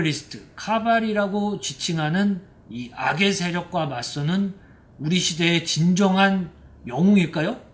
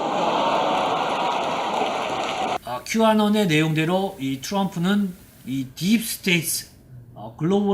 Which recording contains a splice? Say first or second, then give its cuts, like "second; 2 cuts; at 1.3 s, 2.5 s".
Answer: second; 1 cut; at 2.5 s